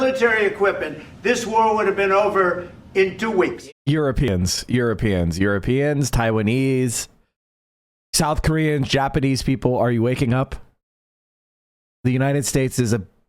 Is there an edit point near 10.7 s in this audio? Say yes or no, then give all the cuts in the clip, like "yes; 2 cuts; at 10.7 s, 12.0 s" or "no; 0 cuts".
no; 1 cut; at 3.6 s